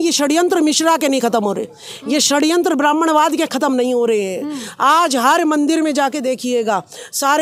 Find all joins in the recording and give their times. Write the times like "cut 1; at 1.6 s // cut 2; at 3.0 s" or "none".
none